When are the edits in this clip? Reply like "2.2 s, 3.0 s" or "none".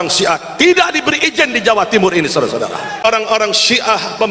3.0 s